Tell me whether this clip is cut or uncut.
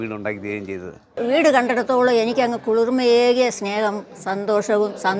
cut